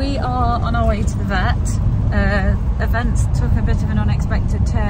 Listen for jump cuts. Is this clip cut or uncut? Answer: uncut